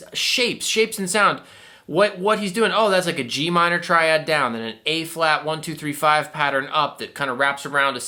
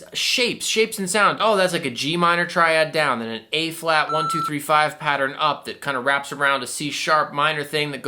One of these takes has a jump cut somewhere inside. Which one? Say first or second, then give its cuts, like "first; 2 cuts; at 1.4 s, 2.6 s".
second; 1 cut; at 1.4 s